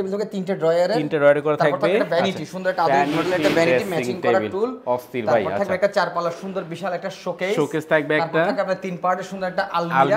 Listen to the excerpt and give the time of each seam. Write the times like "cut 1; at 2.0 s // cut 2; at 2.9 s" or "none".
none